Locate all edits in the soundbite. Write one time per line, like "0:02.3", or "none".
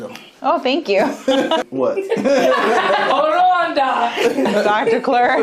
0:01.6
0:03.1
0:04.5

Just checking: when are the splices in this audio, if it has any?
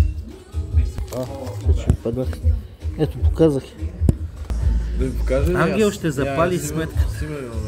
0:01.0

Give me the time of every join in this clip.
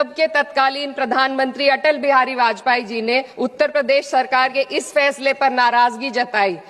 0:03.3

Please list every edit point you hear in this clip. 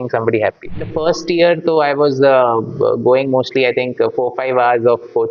0:00.9

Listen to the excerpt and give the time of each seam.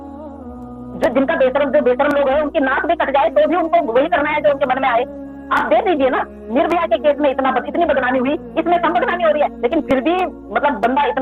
none

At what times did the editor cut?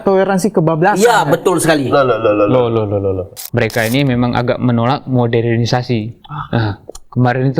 0:03.3

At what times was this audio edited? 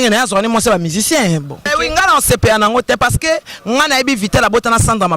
0:01.7

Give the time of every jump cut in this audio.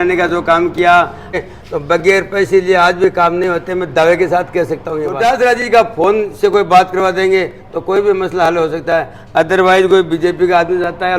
0:01.4
0:05.1

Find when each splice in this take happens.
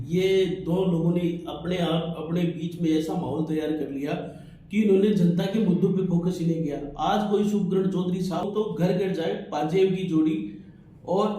0:08.4

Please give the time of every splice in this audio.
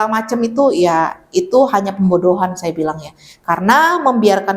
none

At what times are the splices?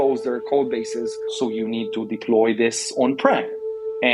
0:01.3

